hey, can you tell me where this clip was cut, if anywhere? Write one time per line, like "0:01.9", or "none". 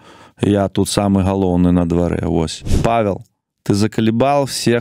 0:02.6